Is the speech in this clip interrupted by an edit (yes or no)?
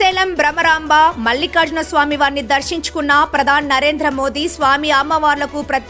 no